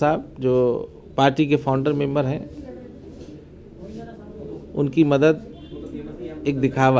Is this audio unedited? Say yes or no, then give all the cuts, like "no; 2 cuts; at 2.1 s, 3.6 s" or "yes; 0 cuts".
yes; 0 cuts